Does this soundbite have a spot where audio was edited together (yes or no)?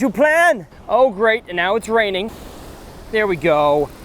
yes